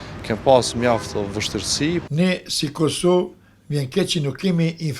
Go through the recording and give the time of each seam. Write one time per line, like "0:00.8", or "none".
0:02.0